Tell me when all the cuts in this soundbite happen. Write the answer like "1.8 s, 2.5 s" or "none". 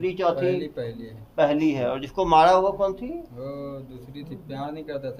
none